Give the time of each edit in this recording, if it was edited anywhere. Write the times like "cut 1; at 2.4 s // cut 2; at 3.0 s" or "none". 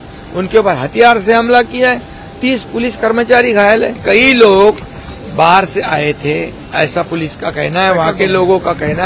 cut 1; at 4.0 s